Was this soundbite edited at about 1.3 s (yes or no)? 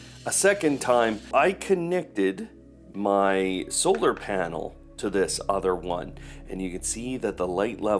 yes